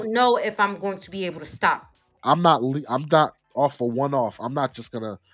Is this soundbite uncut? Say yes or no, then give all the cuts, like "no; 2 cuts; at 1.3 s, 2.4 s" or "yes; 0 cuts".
no; 1 cut; at 2.2 s